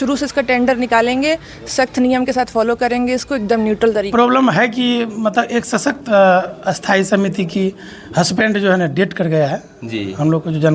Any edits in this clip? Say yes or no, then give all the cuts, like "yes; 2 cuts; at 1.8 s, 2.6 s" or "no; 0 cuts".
yes; 1 cut; at 4.1 s